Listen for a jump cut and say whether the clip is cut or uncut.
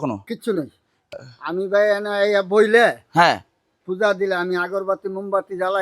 cut